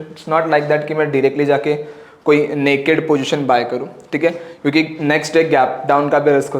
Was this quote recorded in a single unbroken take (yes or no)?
yes